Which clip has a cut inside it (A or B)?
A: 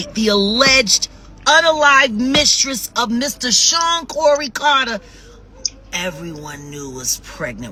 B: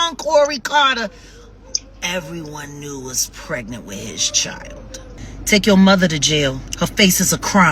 B